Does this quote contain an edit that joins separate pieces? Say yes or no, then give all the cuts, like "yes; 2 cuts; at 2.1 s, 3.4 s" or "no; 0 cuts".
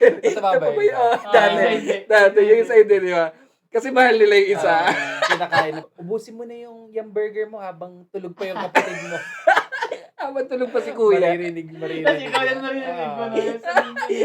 yes; 1 cut; at 5.9 s